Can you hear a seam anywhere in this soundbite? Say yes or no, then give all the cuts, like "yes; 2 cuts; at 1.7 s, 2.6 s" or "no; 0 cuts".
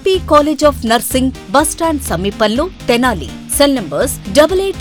no; 0 cuts